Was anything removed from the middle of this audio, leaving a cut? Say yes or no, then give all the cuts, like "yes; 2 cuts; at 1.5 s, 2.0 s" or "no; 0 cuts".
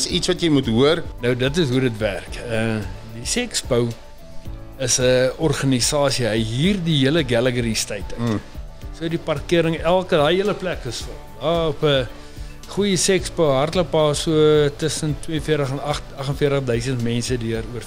yes; 1 cut; at 1.1 s